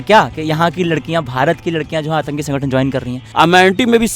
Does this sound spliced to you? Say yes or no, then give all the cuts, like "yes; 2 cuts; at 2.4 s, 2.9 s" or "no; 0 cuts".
yes; 1 cut; at 3.2 s